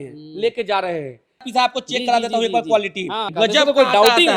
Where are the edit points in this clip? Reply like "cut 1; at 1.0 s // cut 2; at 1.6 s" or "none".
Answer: cut 1; at 1.5 s // cut 2; at 3.3 s